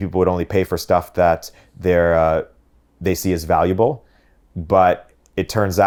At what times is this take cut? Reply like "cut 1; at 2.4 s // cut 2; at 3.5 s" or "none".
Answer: none